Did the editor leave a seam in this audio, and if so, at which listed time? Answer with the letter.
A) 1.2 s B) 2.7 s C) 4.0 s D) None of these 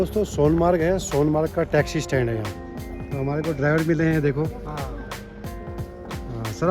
B